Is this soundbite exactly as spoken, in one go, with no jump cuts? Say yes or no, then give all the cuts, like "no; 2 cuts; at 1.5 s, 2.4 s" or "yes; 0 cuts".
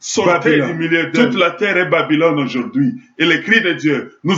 no; 1 cut; at 1.2 s